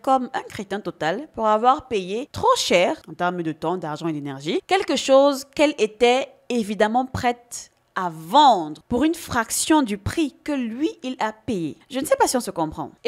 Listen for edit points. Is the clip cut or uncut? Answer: uncut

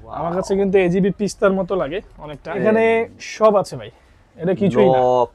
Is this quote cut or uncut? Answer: cut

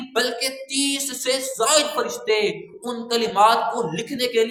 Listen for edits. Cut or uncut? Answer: uncut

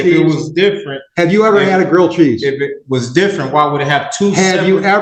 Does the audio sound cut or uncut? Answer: uncut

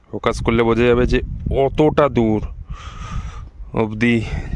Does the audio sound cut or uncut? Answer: uncut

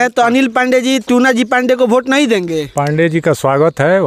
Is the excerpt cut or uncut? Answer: uncut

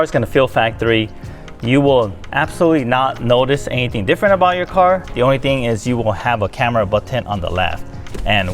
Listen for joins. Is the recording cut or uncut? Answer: uncut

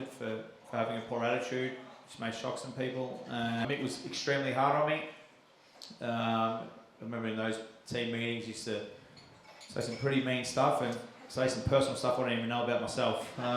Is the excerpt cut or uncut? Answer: cut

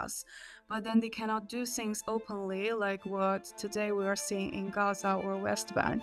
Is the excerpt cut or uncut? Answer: uncut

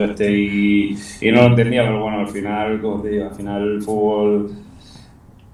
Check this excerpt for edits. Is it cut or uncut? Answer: uncut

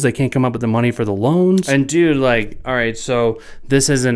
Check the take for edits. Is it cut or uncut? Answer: cut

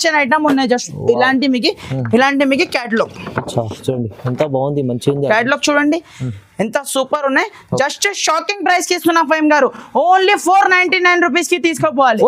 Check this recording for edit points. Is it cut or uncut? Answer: uncut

